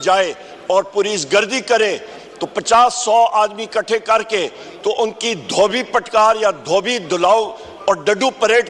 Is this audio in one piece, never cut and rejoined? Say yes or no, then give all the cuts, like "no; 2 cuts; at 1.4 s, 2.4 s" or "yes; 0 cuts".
yes; 0 cuts